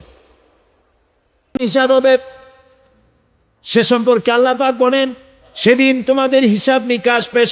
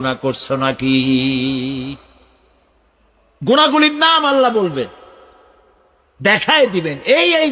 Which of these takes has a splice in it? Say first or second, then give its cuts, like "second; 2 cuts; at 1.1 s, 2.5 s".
first; 1 cut; at 1.6 s